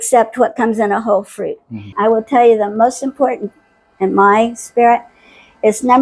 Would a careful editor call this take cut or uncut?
cut